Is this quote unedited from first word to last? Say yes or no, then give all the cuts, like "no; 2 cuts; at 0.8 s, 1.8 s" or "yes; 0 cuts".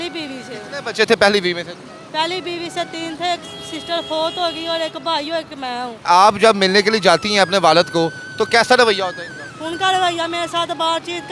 no; 1 cut; at 6.0 s